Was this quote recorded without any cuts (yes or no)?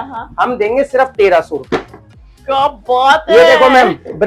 yes